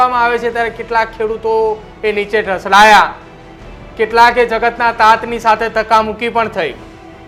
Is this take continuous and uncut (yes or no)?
yes